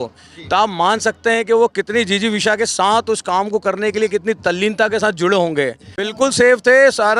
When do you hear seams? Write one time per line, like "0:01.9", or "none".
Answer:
0:05.9